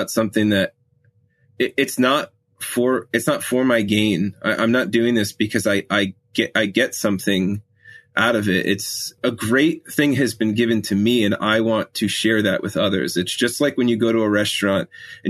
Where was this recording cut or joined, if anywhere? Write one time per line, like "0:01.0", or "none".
0:09.2